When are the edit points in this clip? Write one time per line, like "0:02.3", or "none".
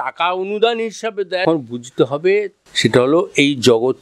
0:01.4
0:02.6